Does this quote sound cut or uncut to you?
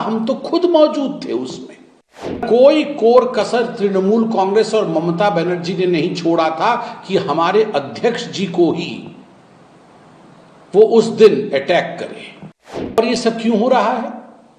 cut